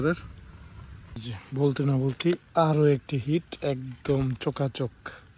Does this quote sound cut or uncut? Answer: cut